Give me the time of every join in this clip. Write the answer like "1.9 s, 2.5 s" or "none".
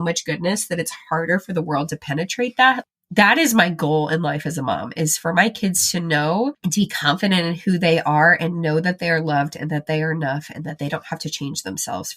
6.6 s